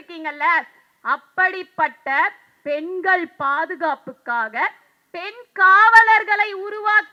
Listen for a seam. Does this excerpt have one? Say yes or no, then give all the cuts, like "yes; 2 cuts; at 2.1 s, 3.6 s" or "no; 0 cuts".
no; 0 cuts